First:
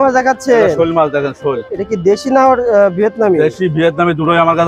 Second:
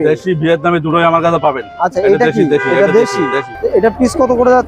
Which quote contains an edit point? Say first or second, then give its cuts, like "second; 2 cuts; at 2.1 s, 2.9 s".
second; 1 cut; at 3.5 s